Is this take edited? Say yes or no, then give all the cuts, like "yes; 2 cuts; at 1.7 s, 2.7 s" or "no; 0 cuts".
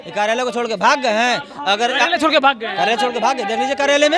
no; 0 cuts